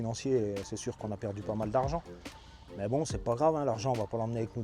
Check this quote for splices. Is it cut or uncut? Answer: uncut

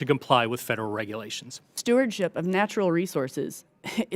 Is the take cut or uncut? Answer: cut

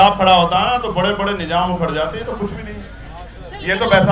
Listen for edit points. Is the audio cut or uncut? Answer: uncut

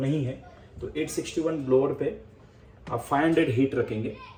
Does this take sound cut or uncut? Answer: uncut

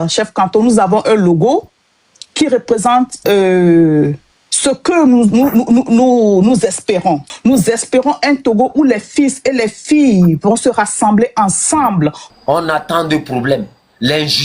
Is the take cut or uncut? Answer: cut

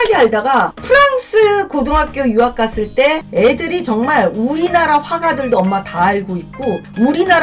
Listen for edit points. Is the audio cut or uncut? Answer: cut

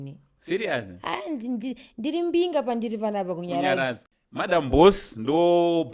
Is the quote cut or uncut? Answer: cut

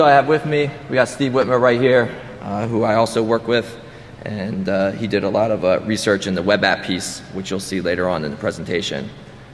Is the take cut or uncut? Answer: uncut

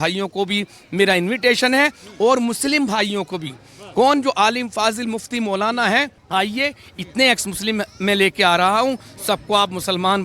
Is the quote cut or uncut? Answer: cut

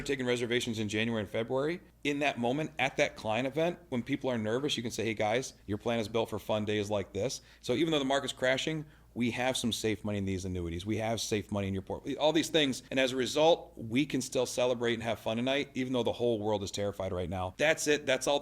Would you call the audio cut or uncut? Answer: cut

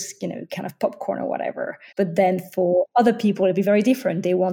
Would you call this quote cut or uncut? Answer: cut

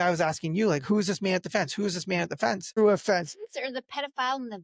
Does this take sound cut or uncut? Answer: cut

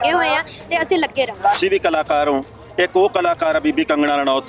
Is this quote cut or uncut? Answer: cut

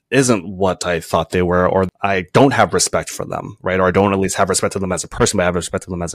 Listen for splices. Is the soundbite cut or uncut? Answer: uncut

